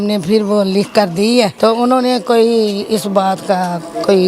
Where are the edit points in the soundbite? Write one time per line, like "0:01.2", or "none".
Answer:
0:01.5